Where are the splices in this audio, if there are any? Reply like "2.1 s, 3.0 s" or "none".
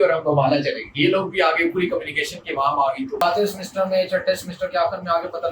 3.2 s